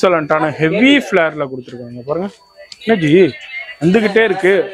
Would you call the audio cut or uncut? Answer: uncut